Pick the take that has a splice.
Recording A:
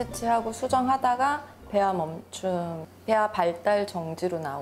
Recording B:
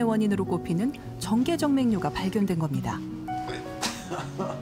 A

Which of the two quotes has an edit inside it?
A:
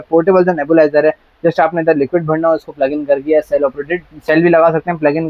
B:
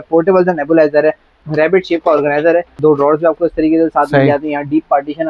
B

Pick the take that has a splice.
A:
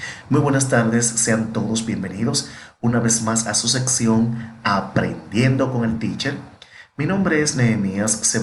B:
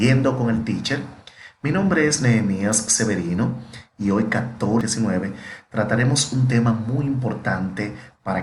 B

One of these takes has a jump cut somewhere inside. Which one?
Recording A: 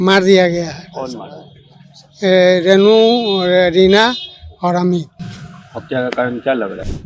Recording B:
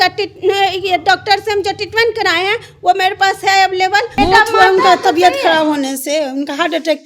B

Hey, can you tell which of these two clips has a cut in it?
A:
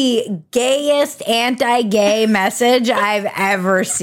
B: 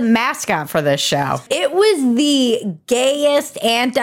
B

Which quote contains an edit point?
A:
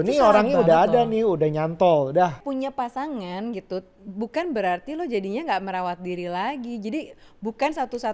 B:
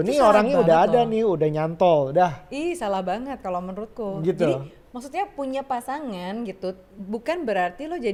A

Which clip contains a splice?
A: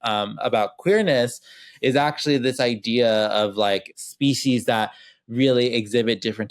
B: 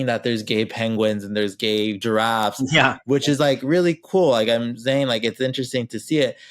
A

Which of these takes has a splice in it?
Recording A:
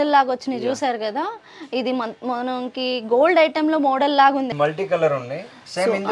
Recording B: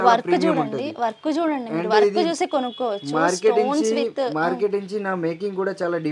A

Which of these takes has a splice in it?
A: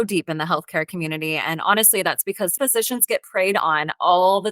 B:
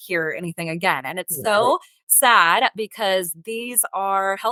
A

